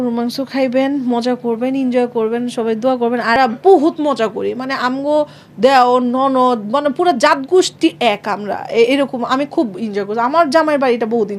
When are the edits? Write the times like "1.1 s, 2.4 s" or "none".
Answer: 3.4 s